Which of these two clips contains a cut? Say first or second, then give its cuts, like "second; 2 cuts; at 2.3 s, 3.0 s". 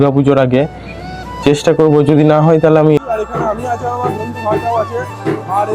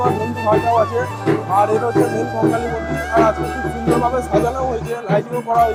first; 1 cut; at 3.0 s